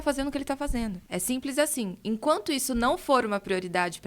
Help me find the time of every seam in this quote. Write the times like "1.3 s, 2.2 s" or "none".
1.0 s